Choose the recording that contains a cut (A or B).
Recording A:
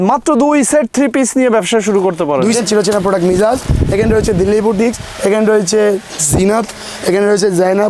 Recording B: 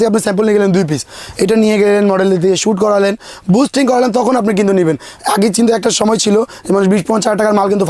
A